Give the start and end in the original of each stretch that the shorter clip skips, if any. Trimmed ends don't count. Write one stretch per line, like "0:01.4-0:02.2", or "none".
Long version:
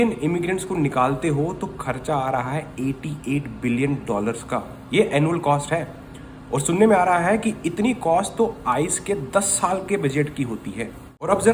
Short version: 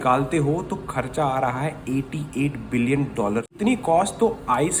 0:04.4-0:07.7